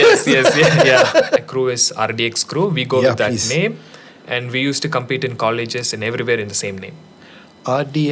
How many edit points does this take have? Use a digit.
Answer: 1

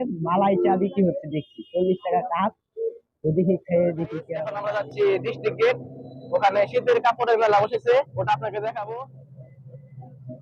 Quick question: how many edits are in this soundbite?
2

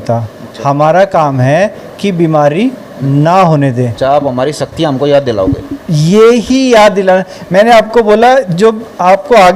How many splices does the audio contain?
1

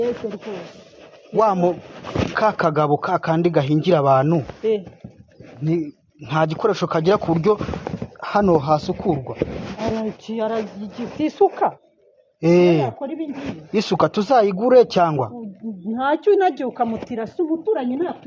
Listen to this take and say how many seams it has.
0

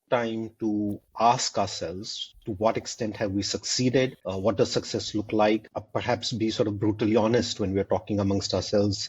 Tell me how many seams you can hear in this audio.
1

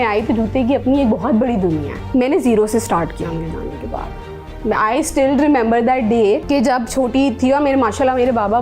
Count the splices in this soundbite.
2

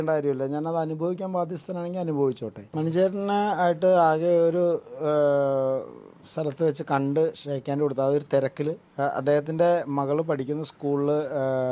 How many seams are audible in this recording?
1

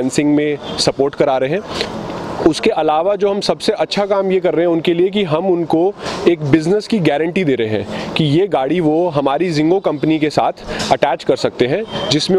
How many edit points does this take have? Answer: 1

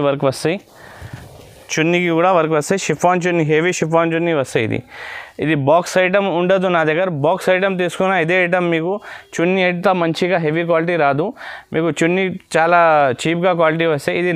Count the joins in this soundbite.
0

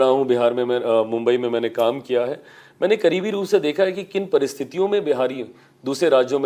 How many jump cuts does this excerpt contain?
0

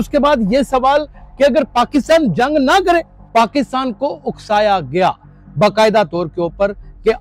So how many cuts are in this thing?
1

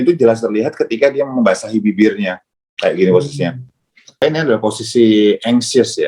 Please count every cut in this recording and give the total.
1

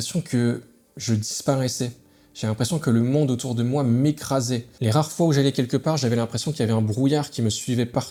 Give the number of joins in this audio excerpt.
0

